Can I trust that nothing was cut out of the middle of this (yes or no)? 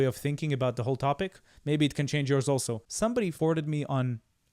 no